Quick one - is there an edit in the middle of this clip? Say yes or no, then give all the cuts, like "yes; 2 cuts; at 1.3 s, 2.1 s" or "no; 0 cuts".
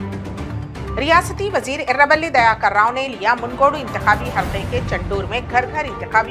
yes; 1 cut; at 0.9 s